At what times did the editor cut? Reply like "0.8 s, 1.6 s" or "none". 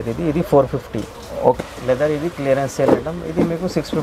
1.6 s

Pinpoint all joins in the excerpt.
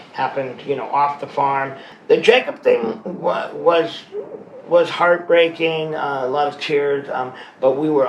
1.9 s

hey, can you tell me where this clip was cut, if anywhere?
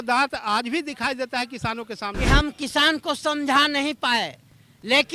2.2 s

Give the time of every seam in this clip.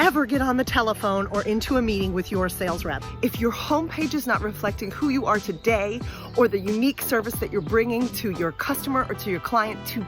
3.0 s

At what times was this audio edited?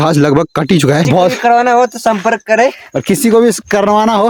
1.1 s

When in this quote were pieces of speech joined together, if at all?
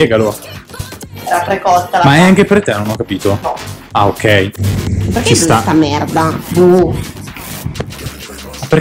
4.6 s

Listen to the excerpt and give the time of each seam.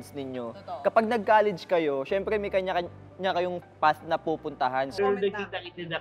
5.0 s

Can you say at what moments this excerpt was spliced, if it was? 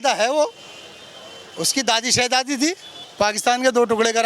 3.0 s

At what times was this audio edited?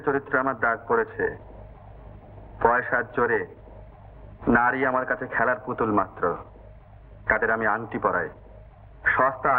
none

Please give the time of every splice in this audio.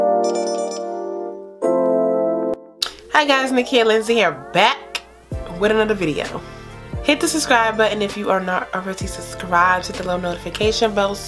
2.5 s

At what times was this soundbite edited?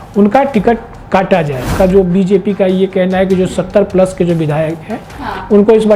1.6 s

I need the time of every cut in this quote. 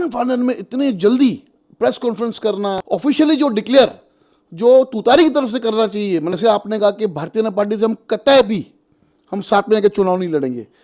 2.8 s, 6.3 s

